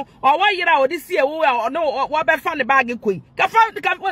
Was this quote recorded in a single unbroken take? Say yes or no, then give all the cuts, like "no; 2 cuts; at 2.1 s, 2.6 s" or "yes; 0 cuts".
yes; 0 cuts